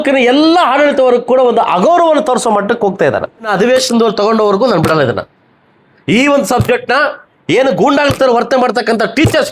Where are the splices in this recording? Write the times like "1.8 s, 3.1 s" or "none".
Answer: 3.5 s